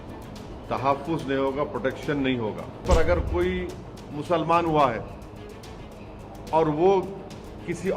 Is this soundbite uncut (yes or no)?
no